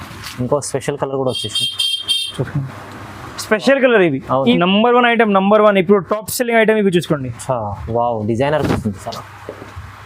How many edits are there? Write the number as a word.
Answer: one